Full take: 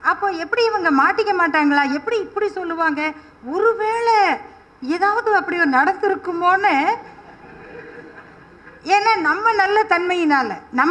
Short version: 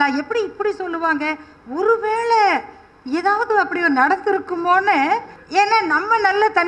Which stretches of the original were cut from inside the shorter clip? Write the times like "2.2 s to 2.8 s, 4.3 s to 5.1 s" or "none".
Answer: 7.1 s to 8.7 s